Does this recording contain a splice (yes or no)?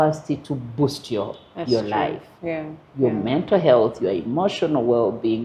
no